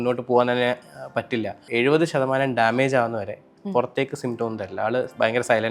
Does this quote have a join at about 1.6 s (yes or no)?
yes